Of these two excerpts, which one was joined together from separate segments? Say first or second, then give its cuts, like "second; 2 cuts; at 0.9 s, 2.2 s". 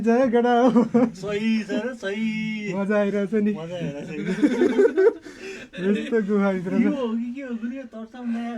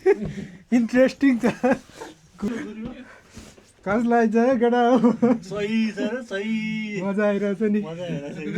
second; 1 cut; at 2.5 s